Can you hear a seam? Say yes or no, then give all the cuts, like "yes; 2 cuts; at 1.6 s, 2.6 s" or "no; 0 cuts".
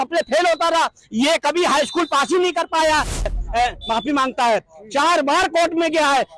yes; 1 cut; at 3.3 s